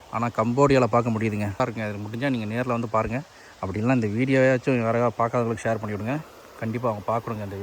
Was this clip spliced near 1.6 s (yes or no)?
yes